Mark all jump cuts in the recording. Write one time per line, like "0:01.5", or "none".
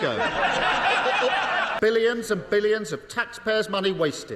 0:01.7

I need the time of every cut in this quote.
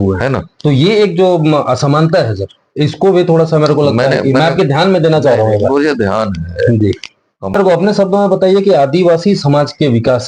0:07.5

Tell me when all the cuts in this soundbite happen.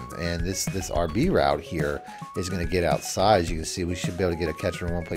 none

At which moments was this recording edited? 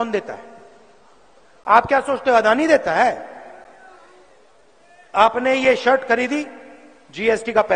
none

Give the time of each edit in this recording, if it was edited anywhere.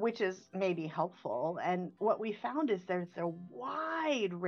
none

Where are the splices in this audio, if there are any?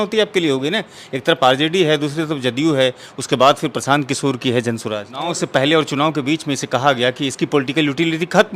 0:05.3

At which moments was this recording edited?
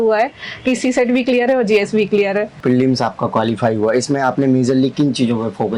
0:02.6

